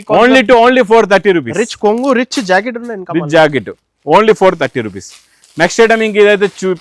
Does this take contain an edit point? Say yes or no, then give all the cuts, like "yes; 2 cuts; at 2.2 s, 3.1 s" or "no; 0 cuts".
no; 0 cuts